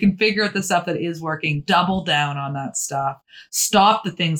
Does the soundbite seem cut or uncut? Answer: uncut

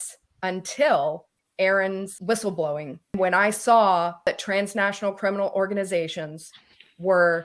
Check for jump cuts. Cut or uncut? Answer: cut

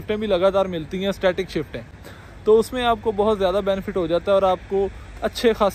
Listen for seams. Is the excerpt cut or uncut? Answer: uncut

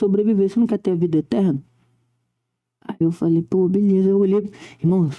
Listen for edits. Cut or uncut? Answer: uncut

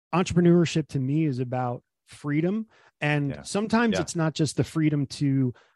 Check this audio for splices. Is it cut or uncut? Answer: uncut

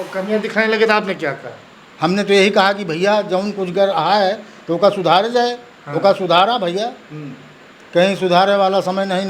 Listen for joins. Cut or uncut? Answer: uncut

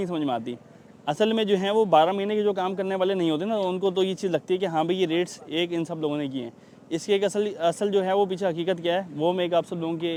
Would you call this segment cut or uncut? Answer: uncut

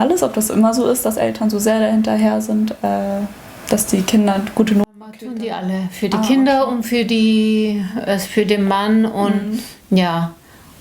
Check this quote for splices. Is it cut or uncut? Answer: cut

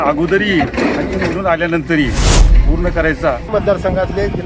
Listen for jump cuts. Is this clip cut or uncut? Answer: cut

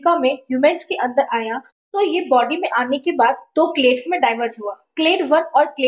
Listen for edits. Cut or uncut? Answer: uncut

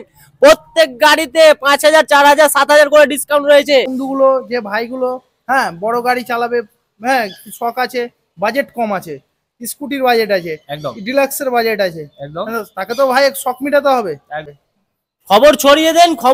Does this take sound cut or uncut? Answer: cut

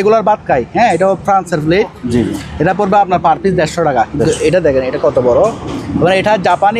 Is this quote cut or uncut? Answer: uncut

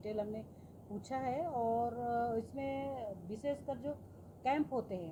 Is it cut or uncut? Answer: uncut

